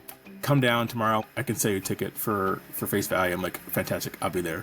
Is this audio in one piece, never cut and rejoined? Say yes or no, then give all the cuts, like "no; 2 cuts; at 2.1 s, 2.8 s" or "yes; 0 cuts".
no; 1 cut; at 1.2 s